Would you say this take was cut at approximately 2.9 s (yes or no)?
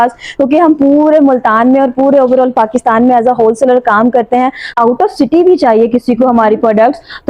no